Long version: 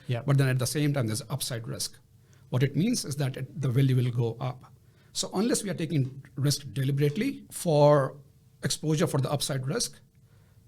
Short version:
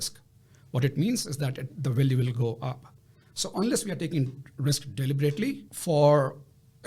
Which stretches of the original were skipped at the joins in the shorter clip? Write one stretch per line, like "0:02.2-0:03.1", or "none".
none